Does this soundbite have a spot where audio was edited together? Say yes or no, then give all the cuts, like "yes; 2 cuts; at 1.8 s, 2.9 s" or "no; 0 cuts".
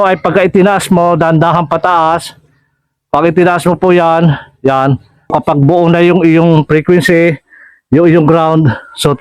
yes; 1 cut; at 5.3 s